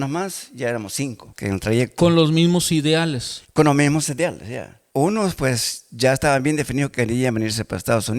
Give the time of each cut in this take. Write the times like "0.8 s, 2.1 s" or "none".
1.3 s